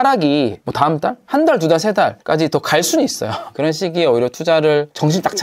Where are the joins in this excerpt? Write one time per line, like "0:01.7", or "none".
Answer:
0:03.5